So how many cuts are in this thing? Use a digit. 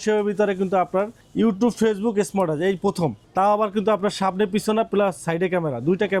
2